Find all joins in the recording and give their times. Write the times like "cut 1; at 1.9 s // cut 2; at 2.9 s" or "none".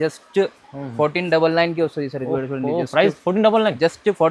none